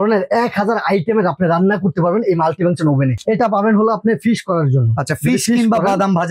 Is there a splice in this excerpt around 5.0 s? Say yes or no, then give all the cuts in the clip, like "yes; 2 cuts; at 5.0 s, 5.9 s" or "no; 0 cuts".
no; 1 cut; at 3.2 s